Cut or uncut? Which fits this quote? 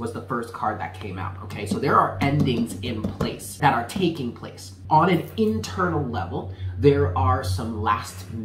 cut